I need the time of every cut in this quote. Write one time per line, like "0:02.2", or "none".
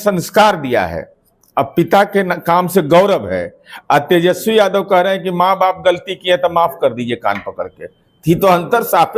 none